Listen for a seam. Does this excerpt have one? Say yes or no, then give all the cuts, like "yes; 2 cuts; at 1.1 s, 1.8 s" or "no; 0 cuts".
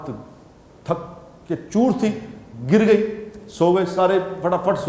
no; 0 cuts